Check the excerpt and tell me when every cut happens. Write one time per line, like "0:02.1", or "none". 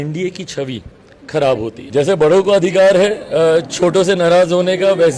0:01.8